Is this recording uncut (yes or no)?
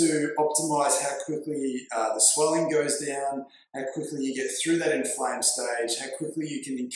yes